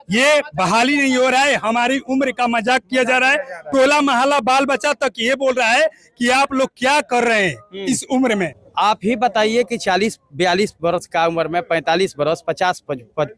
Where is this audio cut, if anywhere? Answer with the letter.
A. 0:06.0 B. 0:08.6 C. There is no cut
B